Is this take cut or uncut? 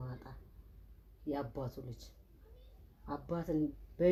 uncut